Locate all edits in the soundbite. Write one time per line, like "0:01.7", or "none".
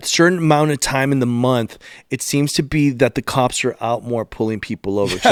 none